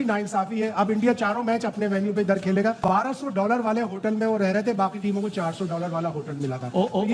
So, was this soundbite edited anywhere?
yes; 1 cut; at 2.8 s

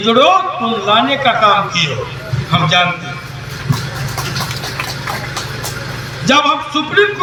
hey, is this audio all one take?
yes; 0 cuts

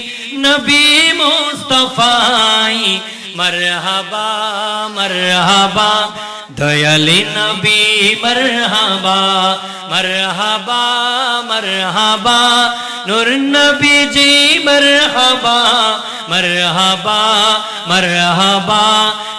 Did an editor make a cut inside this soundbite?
no; 0 cuts

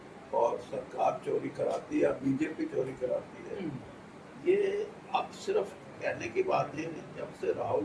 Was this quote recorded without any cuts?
yes; 0 cuts

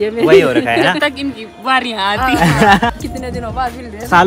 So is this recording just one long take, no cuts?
no; 1 cut; at 2.9 s

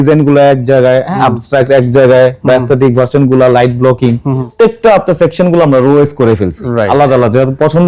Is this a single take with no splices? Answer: no; 2 cuts; at 1.1 s, 4.5 s

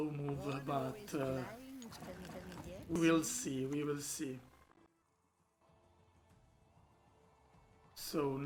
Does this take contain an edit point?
no; 0 cuts

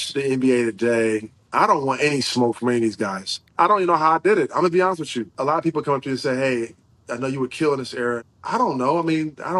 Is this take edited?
yes; 4 cuts; at 1.4 s, 3.5 s, 5.3 s, 8.2 s

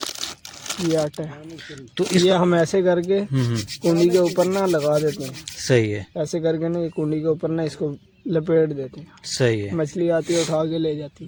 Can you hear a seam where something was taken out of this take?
no; 0 cuts

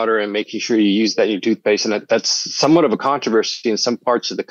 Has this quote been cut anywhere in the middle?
no; 0 cuts

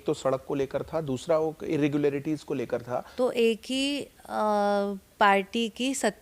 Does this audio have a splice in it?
yes; 1 cut; at 3.0 s

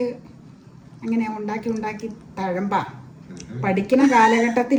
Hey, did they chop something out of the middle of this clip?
no; 0 cuts

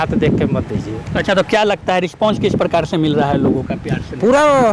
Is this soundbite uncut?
yes; 0 cuts

